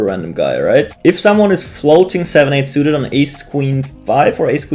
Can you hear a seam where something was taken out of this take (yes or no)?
yes